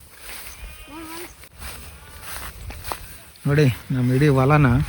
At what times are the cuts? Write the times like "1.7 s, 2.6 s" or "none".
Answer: 1.5 s